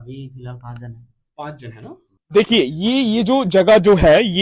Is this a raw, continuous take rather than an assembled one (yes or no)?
no